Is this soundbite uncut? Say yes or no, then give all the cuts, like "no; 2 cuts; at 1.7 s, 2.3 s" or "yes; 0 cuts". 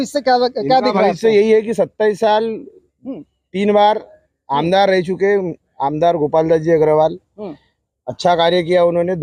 yes; 0 cuts